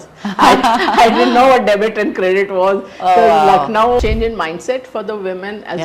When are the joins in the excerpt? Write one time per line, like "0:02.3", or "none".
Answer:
0:04.0